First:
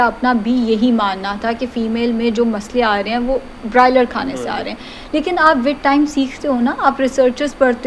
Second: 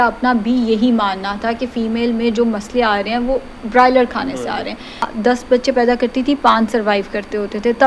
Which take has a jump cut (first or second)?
second